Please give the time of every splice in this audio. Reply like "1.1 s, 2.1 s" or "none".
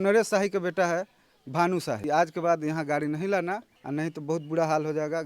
2.0 s, 3.7 s